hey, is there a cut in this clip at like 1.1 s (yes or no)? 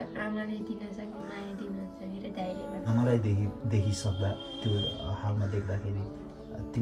no